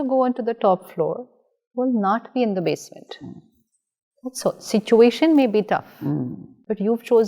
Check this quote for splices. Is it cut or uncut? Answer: uncut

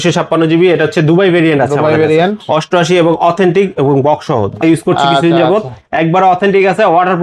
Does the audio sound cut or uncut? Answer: cut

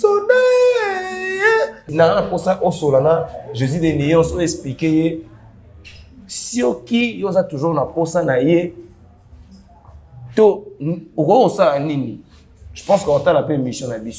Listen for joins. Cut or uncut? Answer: cut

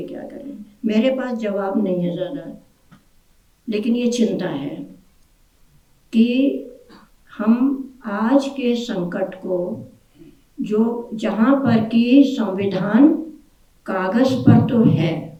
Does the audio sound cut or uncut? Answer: uncut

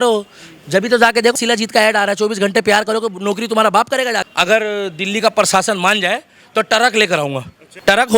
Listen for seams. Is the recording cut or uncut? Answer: cut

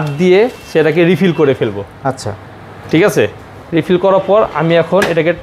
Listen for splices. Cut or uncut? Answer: uncut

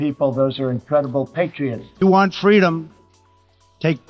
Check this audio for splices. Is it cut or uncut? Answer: uncut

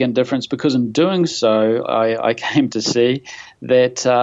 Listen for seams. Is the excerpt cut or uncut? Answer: uncut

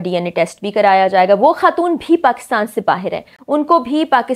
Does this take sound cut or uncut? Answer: uncut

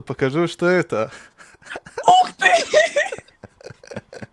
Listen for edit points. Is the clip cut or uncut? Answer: uncut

